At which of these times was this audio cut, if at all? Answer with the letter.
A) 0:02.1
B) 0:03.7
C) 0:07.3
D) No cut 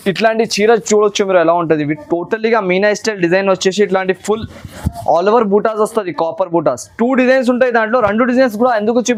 D